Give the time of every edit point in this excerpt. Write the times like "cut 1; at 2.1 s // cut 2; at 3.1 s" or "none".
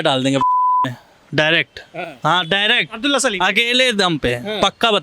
none